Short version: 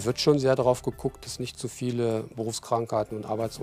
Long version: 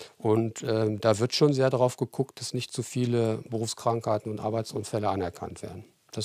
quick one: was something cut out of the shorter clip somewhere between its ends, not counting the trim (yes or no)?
no